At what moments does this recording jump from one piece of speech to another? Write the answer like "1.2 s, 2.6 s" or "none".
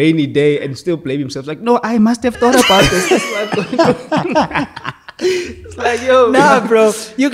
none

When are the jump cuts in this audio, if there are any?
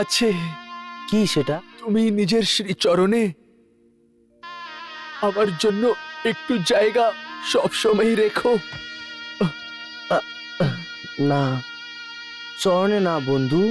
1.5 s

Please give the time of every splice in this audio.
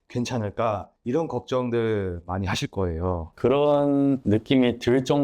3.3 s

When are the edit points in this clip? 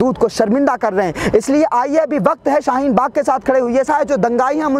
3.8 s

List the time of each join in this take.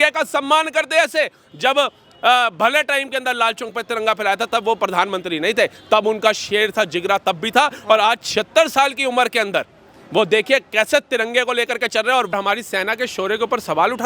12.3 s

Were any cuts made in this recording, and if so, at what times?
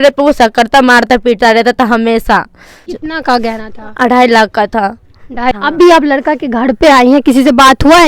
2.9 s, 5.5 s

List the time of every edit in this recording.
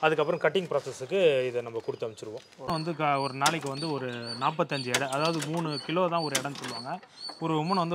2.9 s

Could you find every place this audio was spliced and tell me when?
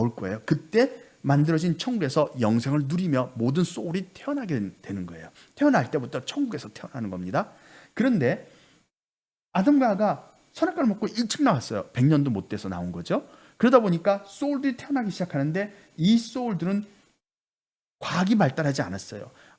none

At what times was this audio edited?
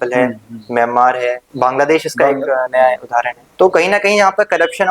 1.4 s, 3.4 s

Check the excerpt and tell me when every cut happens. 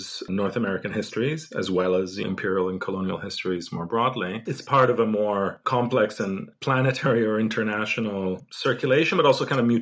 4.5 s

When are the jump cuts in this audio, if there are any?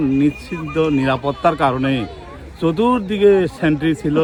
none

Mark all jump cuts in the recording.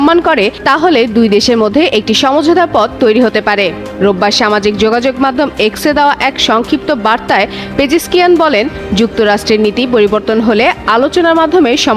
none

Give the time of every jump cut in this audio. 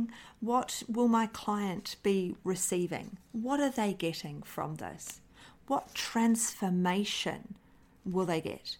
none

